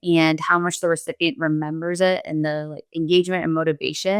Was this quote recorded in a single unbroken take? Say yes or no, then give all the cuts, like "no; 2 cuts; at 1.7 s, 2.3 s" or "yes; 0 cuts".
yes; 0 cuts